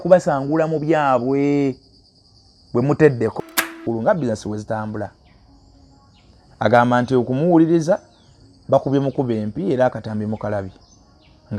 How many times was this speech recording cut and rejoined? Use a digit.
1